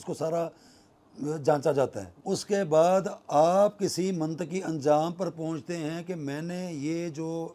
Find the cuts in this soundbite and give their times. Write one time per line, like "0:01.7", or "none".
0:02.1